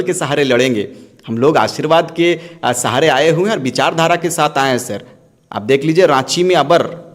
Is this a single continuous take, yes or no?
yes